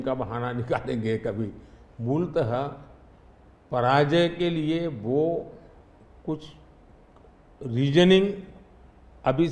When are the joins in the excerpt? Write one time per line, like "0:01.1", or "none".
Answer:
none